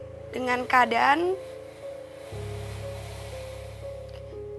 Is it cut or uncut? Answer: uncut